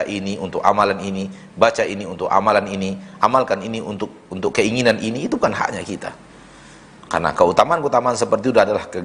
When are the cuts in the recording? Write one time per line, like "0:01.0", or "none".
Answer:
none